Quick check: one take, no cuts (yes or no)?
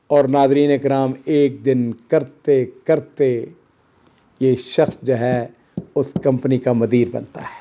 yes